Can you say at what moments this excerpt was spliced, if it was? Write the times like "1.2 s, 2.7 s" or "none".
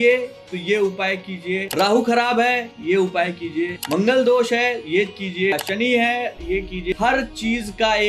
1.7 s, 3.8 s, 5.5 s, 7.0 s